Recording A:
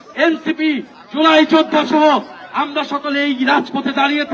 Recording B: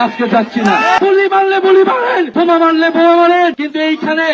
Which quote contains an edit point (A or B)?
B